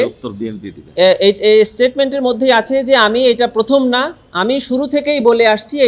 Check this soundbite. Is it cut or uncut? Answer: uncut